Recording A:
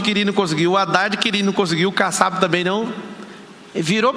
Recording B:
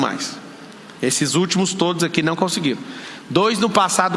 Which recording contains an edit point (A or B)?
A